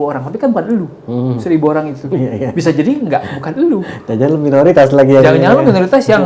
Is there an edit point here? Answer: no; 0 cuts

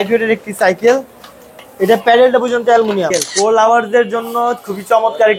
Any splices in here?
yes; 1 cut; at 3.1 s

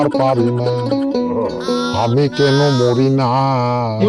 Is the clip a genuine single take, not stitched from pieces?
yes; 0 cuts

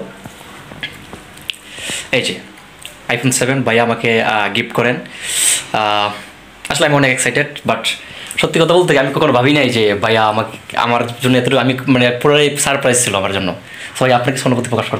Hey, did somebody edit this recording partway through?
no; 0 cuts

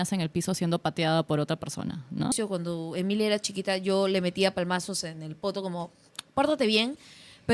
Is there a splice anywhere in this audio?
yes; 1 cut; at 2.3 s

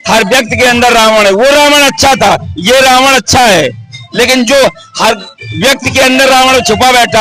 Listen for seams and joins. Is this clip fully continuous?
yes; 0 cuts

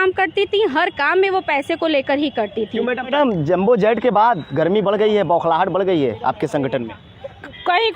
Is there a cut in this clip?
yes; 1 cut; at 3.1 s

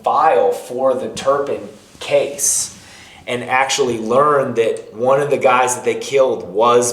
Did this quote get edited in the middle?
no; 0 cuts

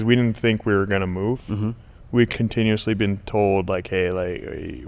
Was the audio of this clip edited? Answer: yes; 1 cut; at 2.3 s

